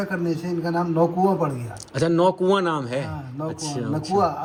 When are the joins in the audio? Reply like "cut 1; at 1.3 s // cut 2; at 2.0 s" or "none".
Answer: none